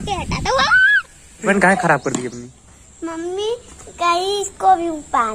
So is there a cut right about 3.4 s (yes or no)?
no